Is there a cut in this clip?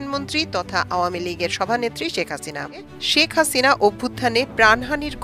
yes; 1 cut; at 2.9 s

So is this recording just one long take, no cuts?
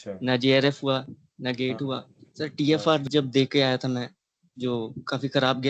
no; 1 cut; at 2.2 s

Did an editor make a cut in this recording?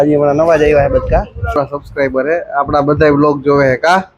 yes; 1 cut; at 1.4 s

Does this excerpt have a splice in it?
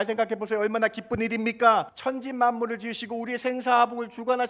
yes; 1 cut; at 1.9 s

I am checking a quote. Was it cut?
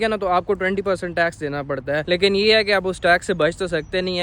yes; 1 cut; at 2.0 s

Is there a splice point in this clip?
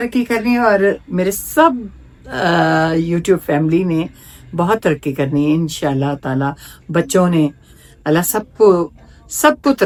no; 0 cuts

